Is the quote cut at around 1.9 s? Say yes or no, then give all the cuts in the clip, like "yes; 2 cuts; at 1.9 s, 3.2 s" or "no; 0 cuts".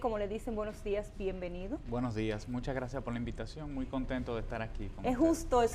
no; 0 cuts